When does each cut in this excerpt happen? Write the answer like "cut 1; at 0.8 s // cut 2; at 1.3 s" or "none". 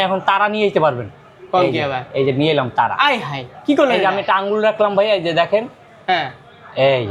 cut 1; at 3.5 s